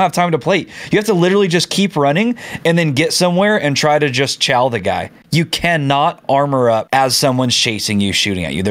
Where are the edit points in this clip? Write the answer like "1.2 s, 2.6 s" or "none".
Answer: 6.9 s